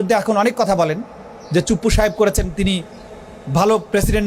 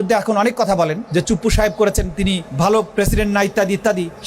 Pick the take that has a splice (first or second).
second